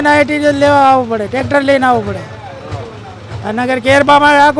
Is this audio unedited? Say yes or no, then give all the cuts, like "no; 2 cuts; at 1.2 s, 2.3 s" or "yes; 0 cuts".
yes; 0 cuts